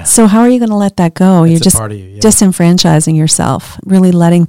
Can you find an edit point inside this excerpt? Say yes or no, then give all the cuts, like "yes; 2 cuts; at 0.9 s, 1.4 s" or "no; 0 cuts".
no; 0 cuts